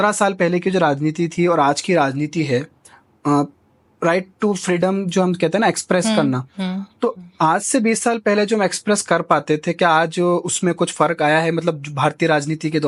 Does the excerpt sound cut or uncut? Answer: uncut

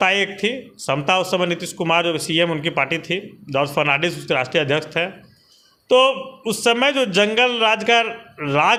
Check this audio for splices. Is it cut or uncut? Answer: uncut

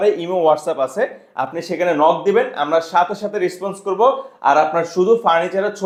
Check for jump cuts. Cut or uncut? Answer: uncut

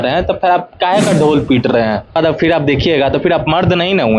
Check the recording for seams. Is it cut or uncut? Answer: cut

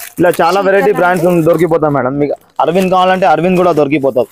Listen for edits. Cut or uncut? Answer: uncut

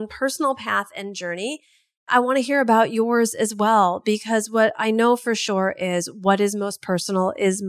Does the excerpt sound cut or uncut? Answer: cut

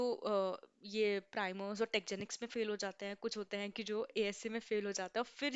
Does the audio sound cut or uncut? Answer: uncut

